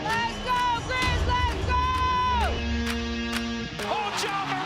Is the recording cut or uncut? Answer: uncut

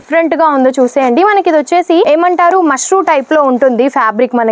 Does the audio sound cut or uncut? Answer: cut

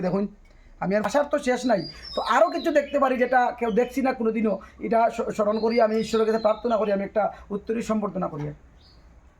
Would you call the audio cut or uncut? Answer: cut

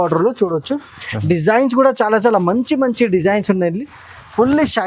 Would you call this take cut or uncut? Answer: uncut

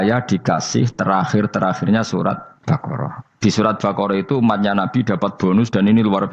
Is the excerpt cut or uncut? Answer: cut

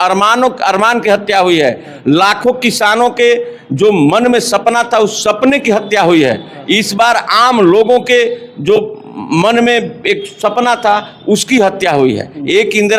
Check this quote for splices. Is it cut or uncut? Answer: uncut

